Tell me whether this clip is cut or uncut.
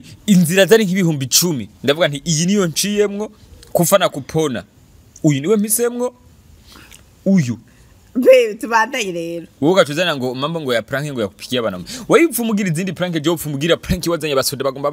uncut